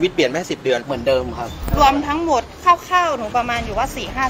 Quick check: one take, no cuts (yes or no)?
no